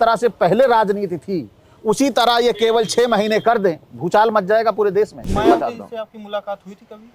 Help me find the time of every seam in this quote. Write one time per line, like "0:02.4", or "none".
0:03.9
0:05.2